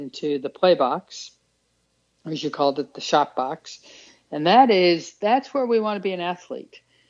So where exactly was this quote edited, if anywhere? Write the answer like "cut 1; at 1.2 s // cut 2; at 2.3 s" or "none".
none

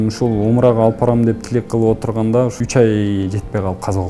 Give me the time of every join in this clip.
cut 1; at 2.6 s

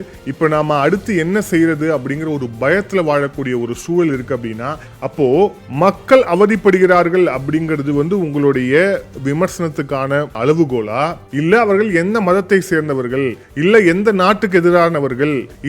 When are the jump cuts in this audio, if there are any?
cut 1; at 4.9 s

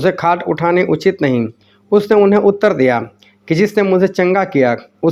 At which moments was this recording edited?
none

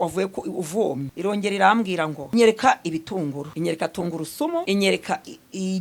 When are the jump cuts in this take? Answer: cut 1; at 1.1 s // cut 2; at 2.2 s // cut 3; at 3.5 s // cut 4; at 4.6 s

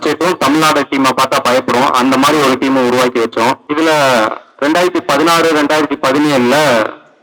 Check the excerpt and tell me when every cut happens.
cut 1; at 3.6 s

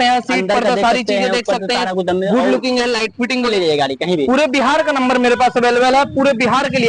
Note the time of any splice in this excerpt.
cut 1; at 3.5 s

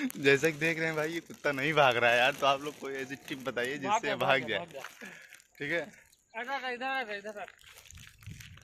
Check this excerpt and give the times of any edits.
none

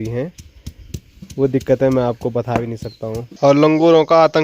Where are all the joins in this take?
cut 1; at 3.2 s

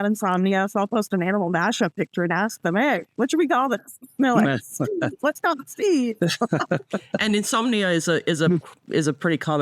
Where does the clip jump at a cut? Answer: none

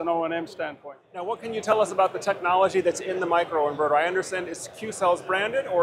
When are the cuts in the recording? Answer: cut 1; at 1.4 s

